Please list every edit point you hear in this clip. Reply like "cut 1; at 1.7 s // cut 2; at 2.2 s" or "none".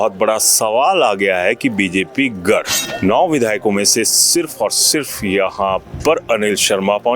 cut 1; at 2.8 s